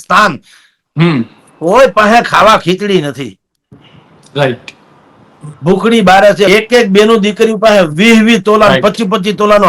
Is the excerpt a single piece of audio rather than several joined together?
no; 1 cut; at 6.5 s

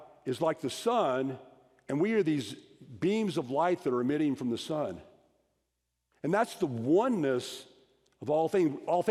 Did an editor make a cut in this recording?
no; 0 cuts

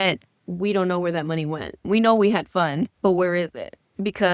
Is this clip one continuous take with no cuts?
no; 2 cuts; at 1.8 s, 2.9 s

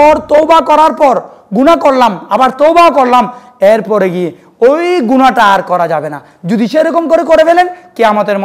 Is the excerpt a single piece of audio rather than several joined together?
yes; 0 cuts

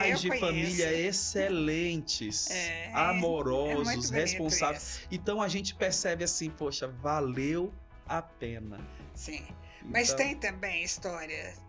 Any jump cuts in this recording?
no; 0 cuts

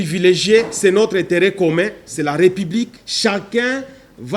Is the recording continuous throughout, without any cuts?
no; 1 cut; at 3.0 s

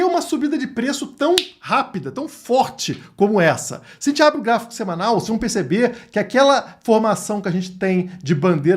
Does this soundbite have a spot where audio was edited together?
no; 0 cuts

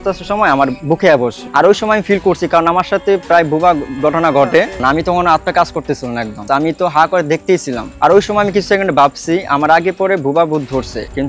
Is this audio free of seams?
yes; 0 cuts

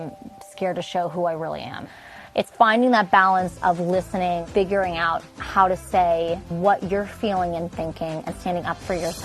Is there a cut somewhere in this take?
yes; 3 cuts; at 1.8 s, 4.4 s, 6.5 s

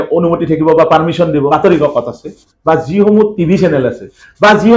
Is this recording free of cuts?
no; 1 cut; at 1.5 s

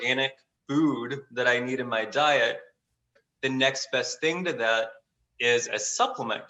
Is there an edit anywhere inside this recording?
yes; 1 cut; at 3.2 s

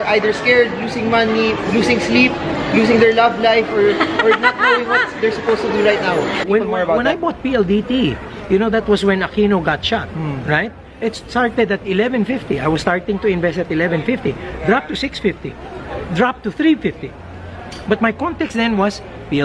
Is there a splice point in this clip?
yes; 1 cut; at 6.4 s

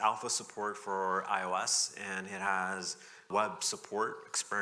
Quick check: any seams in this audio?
yes; 1 cut; at 3.3 s

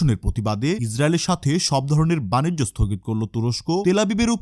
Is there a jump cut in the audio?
no; 0 cuts

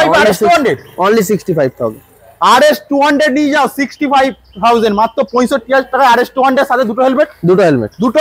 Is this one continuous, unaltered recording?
yes; 0 cuts

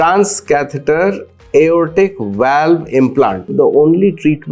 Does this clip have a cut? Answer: yes; 1 cut; at 3.5 s

